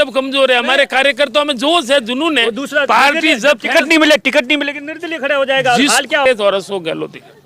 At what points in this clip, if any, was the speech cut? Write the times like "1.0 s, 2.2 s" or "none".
6.2 s